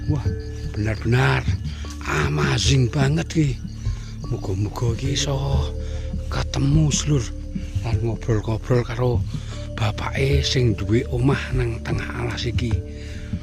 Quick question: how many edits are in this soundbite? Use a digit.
1